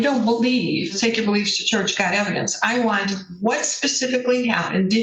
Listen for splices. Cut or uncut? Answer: cut